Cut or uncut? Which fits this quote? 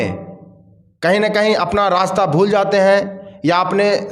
uncut